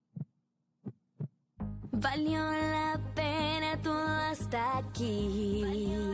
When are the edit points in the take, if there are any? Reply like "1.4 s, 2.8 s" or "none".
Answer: 1.3 s

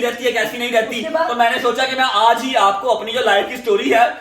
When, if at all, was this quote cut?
none

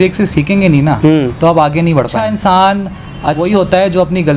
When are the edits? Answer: 2.2 s, 3.4 s

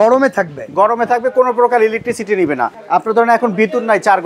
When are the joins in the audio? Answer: 2.7 s

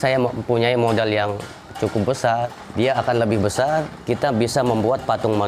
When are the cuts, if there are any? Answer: 2.6 s, 3.9 s

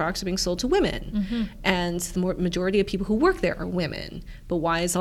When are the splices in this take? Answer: none

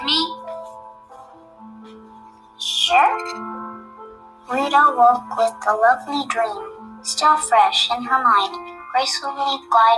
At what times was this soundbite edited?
8.0 s

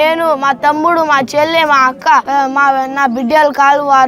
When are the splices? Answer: 2.3 s

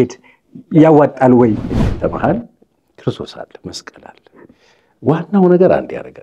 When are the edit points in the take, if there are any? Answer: 1.8 s

